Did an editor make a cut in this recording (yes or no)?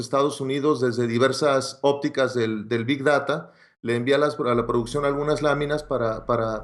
no